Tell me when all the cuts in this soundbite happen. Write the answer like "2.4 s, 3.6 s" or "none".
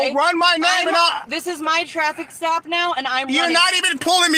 none